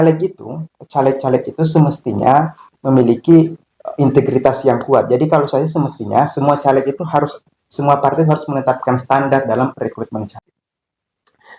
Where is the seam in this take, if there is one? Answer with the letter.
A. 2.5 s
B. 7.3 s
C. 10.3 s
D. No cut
C